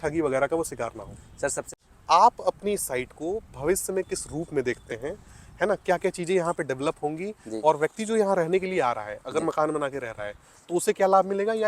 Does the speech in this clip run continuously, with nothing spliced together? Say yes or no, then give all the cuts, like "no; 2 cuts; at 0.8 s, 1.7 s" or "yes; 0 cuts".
no; 1 cut; at 1.7 s